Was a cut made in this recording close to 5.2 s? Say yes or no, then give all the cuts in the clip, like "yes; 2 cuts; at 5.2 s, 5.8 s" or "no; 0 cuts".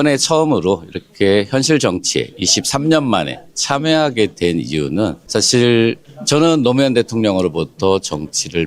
yes; 2 cuts; at 5.2 s, 6.1 s